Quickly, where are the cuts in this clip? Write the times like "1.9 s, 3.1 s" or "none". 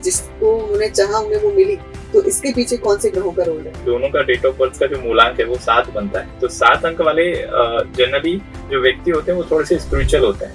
3.8 s

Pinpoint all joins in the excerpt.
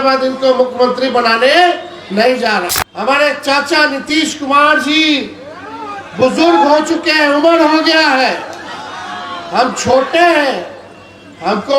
2.8 s

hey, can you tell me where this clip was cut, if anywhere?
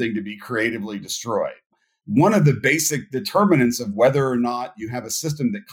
1.7 s

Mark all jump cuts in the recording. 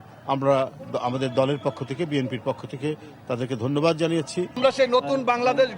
4.6 s

